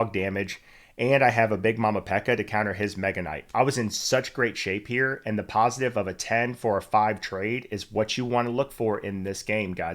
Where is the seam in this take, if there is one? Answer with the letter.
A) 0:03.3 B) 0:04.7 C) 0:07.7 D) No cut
A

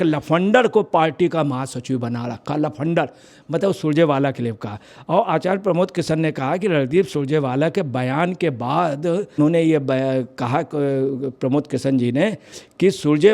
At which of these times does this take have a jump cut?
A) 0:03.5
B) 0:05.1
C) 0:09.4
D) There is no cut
C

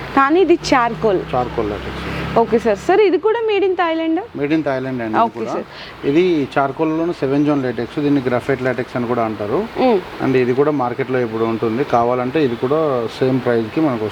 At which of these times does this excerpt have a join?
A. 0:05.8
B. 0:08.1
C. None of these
C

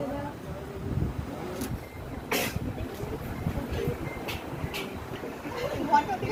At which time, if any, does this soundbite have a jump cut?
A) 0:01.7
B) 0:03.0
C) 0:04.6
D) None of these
D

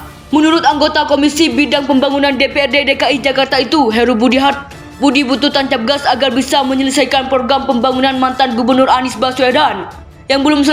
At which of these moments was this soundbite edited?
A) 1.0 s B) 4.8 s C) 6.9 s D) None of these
D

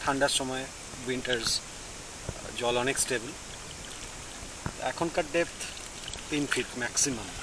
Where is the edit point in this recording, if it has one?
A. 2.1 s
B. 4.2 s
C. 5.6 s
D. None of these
D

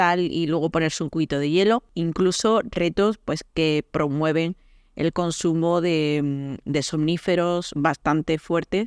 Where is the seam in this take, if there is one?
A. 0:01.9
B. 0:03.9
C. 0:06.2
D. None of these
A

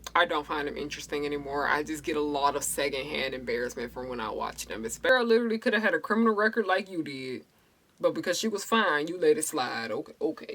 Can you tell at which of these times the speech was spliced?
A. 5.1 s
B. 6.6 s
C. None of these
A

